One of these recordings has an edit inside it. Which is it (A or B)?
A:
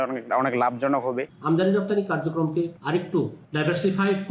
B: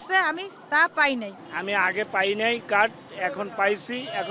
A